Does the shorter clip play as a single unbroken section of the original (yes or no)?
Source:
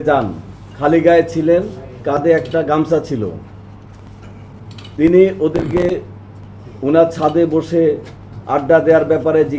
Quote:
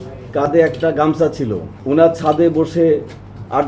no